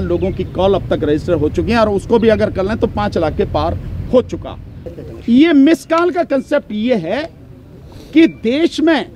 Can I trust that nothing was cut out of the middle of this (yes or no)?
no